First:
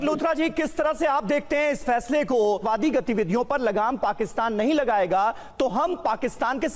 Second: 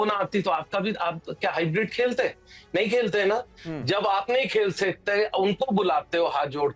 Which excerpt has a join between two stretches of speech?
first; 1 cut; at 2.6 s

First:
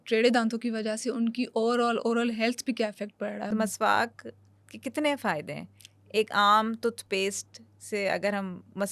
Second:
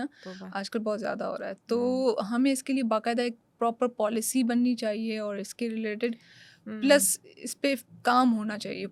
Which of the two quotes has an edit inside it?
first; 1 cut; at 3.5 s

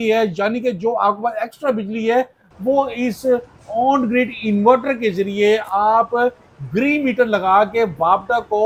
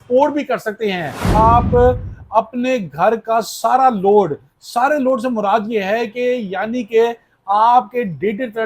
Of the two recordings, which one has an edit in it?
second; 1 cut; at 1.3 s

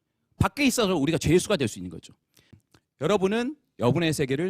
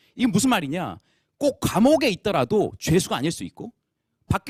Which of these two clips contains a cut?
first; 1 cut; at 2.6 s

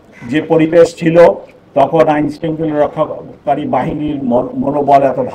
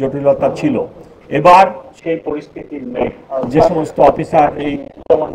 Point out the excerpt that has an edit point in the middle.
second; 2 cuts; at 1.9 s, 3.2 s

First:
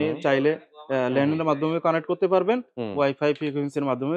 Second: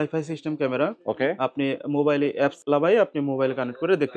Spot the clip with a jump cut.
second; 1 cut; at 2.6 s

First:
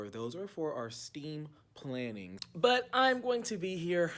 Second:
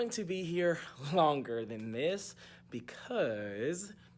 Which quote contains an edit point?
first; 1 cut; at 2.3 s

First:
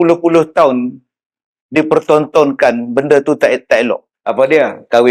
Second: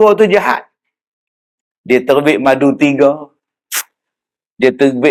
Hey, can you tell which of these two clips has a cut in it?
first; 1 cut; at 4.2 s

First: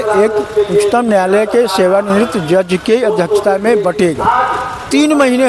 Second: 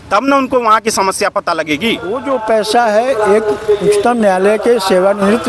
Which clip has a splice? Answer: second; 1 cut; at 2.1 s

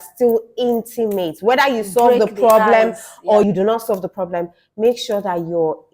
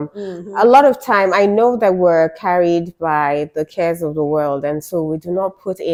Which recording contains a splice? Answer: first; 1 cut; at 3.4 s

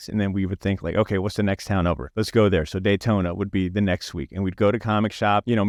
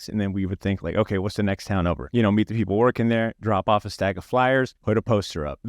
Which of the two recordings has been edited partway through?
second; 1 cut; at 2.1 s

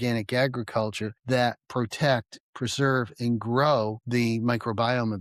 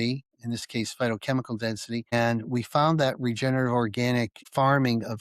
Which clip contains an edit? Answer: second; 1 cut; at 2.1 s

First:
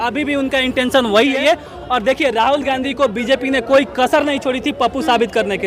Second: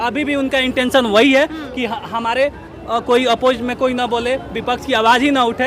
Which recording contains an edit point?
first; 1 cut; at 1.4 s

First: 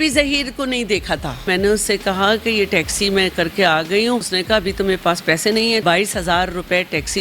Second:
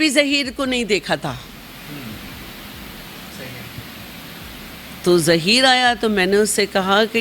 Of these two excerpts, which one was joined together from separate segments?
first; 3 cuts; at 1.5 s, 4.3 s, 5.8 s

